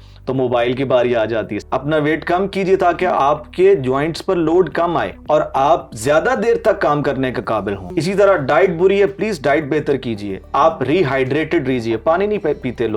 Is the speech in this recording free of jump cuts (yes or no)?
no